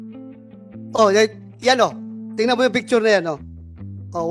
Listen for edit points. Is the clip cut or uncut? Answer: cut